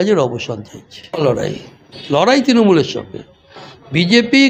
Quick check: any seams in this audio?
yes; 1 cut; at 1.3 s

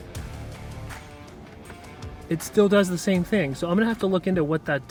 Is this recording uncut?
yes; 0 cuts

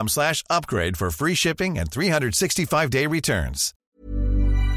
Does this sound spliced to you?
yes; 1 cut; at 3.7 s

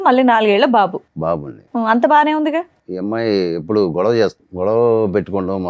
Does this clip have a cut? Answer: yes; 2 cuts; at 2.8 s, 4.4 s

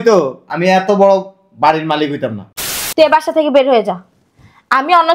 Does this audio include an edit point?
yes; 1 cut; at 2.6 s

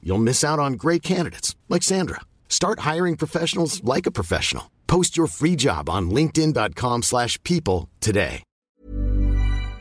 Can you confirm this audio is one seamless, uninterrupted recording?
no; 1 cut; at 8.8 s

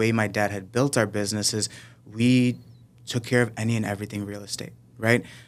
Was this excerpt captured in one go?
yes; 0 cuts

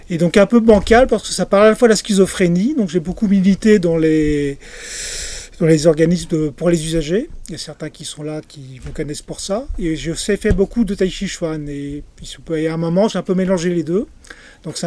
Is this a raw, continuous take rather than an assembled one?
yes; 0 cuts

